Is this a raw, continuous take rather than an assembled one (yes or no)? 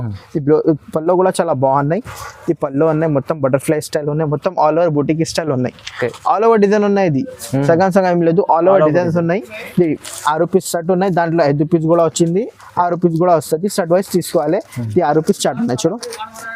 yes